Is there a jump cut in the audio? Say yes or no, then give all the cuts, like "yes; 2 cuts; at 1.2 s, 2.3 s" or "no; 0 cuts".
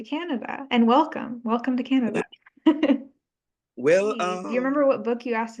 yes; 1 cut; at 4.4 s